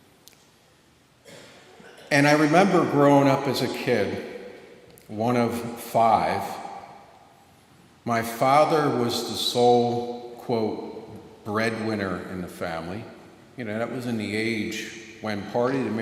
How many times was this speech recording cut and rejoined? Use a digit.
1